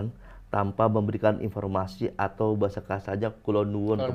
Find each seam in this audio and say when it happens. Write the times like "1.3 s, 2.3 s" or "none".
none